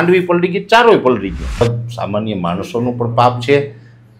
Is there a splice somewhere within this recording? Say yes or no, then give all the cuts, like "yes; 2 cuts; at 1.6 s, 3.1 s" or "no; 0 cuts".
yes; 1 cut; at 1.6 s